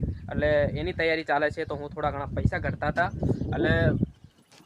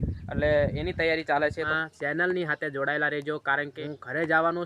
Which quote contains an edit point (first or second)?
second